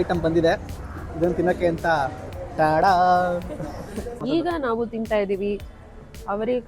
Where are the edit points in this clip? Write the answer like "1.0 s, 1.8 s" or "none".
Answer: 4.1 s